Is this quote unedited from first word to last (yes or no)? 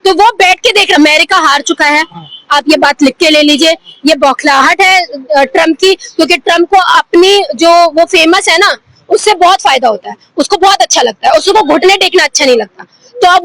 no